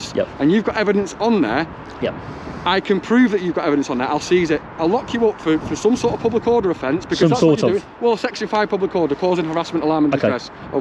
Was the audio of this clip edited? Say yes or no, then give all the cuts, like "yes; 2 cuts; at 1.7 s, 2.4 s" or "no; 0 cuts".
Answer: no; 0 cuts